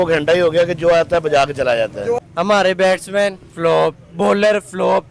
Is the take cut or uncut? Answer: cut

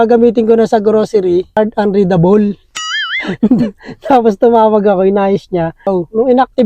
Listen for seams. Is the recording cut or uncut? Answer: cut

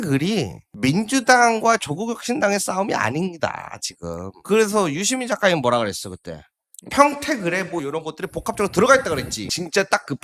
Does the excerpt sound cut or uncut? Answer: uncut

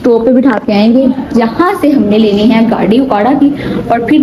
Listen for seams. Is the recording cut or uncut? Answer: uncut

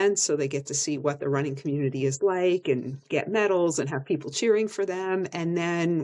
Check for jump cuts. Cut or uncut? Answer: uncut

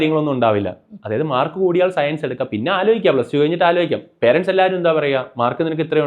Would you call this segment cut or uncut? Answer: uncut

